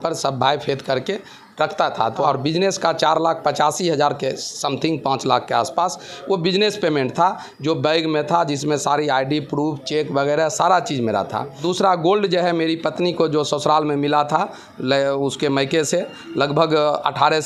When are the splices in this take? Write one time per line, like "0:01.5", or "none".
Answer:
0:02.2
0:11.6